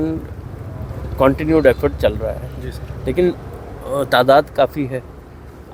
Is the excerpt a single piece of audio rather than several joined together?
yes; 0 cuts

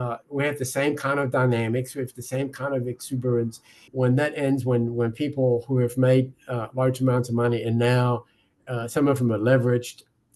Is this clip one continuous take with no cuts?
no; 1 cut; at 3.9 s

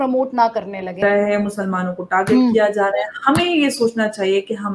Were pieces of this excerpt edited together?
yes; 1 cut; at 1.0 s

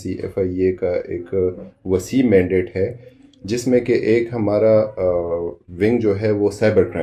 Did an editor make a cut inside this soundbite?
no; 0 cuts

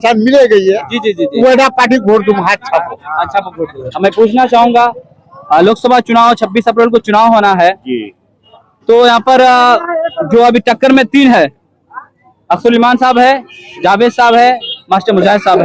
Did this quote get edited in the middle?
yes; 1 cut; at 4.3 s

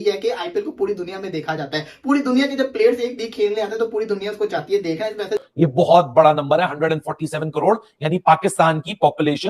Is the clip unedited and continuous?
no; 1 cut; at 5.5 s

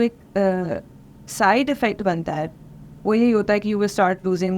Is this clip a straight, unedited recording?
yes; 0 cuts

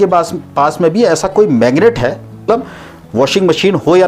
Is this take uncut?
no; 1 cut; at 2.5 s

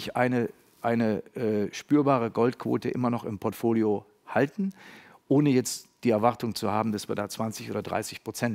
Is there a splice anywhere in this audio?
no; 0 cuts

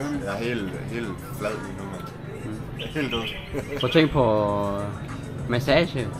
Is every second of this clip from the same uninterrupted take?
yes; 0 cuts

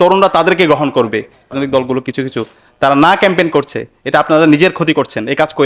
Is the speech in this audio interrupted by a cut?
yes; 1 cut; at 1.5 s

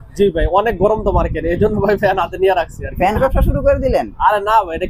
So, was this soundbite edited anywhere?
yes; 1 cut; at 3.2 s

